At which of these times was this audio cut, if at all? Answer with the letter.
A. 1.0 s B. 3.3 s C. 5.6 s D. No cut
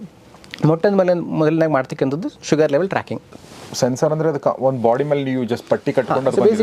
B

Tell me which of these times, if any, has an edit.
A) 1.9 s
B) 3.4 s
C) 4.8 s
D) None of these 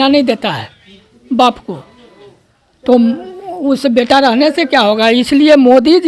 D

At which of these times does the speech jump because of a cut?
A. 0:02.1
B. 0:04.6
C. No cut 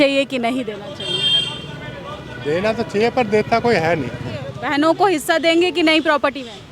B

